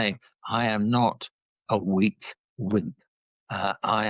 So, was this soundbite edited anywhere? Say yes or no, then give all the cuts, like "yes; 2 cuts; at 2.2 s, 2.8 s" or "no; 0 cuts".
no; 0 cuts